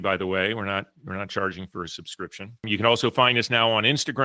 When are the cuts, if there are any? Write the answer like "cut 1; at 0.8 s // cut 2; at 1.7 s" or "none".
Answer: cut 1; at 2.5 s